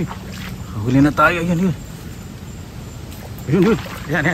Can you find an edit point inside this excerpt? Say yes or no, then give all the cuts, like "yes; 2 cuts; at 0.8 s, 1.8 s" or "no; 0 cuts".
no; 0 cuts